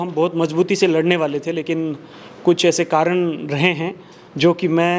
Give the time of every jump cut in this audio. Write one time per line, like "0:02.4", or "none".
none